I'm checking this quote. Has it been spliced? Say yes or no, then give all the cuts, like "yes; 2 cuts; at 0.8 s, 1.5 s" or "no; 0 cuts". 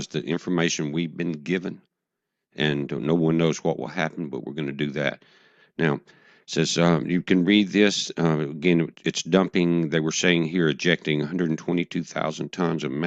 yes; 1 cut; at 9.4 s